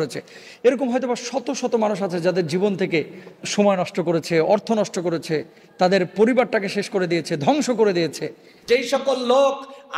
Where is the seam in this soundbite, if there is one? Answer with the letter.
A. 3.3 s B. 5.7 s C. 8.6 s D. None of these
C